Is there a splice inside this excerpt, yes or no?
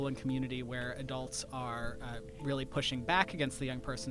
no